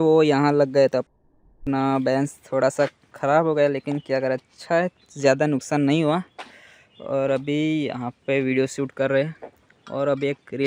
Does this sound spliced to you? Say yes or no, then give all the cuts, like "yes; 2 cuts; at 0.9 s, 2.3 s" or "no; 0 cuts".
no; 0 cuts